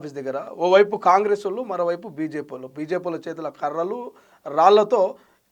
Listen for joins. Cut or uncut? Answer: uncut